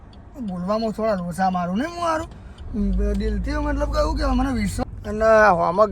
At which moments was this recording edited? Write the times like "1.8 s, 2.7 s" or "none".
4.8 s